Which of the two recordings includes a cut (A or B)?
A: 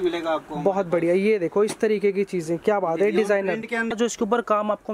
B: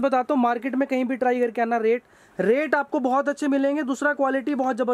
A